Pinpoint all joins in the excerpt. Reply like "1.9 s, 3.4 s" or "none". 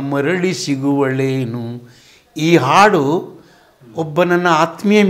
none